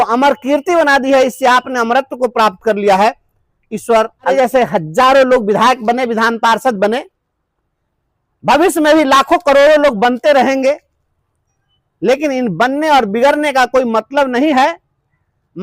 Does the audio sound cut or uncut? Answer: cut